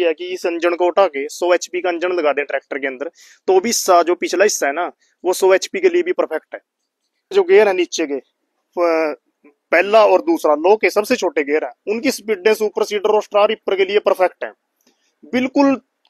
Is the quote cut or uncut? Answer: cut